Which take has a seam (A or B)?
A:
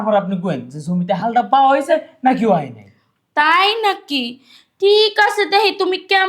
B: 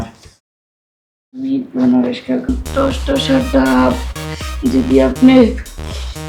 B